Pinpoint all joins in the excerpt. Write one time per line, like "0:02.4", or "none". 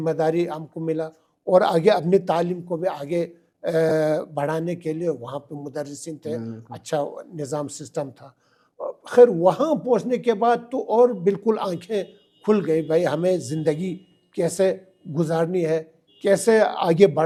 none